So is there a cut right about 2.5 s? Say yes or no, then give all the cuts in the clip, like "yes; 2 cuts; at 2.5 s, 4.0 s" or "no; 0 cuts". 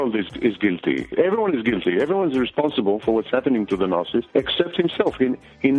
no; 2 cuts; at 1.1 s, 4.3 s